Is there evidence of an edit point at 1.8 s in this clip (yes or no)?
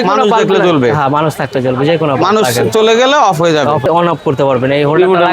no